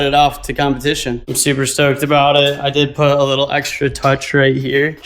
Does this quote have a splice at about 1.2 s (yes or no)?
yes